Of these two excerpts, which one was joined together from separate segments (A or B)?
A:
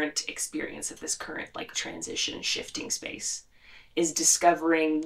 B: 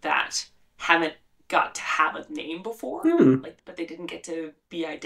B